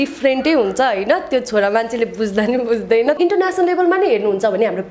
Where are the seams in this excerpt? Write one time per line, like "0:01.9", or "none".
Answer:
0:03.2